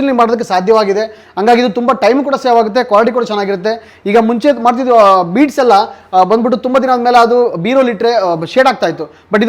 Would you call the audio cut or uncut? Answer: uncut